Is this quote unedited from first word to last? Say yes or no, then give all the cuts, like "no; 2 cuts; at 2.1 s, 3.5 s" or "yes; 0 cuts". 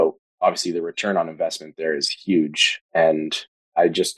yes; 0 cuts